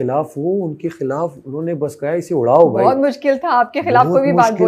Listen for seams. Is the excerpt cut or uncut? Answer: uncut